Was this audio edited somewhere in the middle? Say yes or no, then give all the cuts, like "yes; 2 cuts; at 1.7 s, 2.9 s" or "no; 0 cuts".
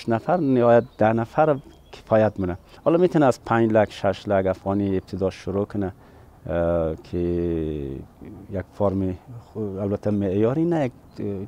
yes; 1 cut; at 2.6 s